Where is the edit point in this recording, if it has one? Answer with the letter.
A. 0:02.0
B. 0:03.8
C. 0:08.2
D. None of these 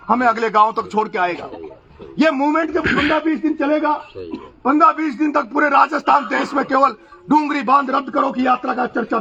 D